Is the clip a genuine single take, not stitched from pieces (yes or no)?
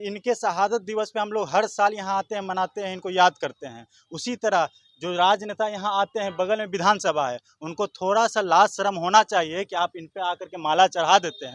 yes